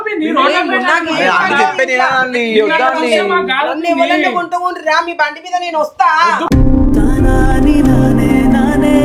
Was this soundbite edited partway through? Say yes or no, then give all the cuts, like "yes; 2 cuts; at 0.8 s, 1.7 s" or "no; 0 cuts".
no; 0 cuts